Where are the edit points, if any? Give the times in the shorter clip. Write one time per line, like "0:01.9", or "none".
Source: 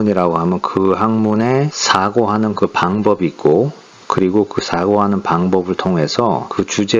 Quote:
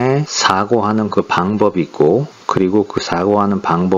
0:02.4